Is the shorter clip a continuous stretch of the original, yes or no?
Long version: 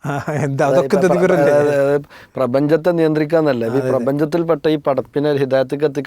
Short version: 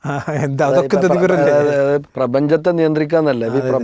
no